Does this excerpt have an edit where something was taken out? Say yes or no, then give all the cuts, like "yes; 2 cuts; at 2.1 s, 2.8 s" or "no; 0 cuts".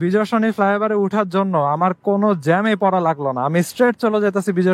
no; 0 cuts